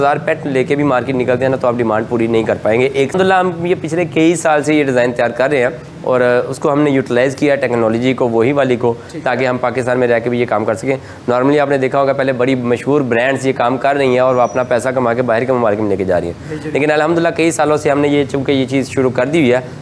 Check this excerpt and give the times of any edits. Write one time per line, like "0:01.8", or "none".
0:03.1